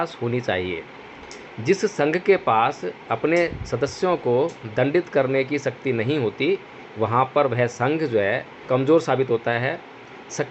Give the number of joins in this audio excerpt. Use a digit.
1